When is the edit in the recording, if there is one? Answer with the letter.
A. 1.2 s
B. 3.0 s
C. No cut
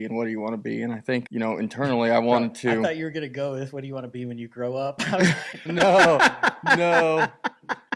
A